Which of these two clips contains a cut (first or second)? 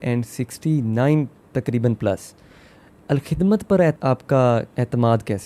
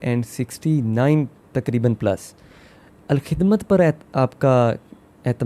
first